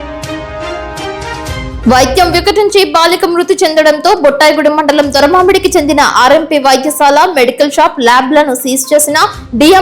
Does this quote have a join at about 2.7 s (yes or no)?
no